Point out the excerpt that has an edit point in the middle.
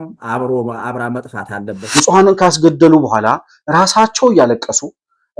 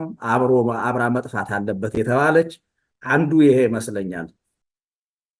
first; 1 cut; at 1.8 s

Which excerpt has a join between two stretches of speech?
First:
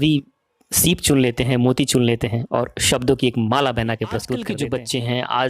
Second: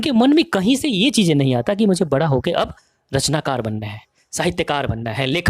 first; 1 cut; at 4.4 s

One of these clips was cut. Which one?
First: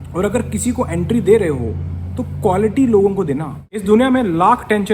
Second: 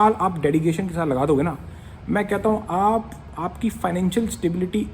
first; 1 cut; at 3.8 s

